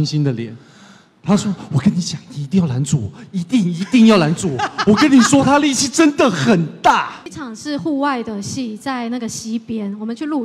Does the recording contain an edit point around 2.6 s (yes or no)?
no